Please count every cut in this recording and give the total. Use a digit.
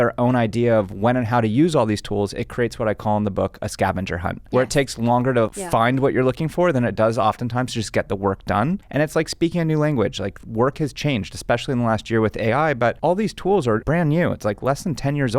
2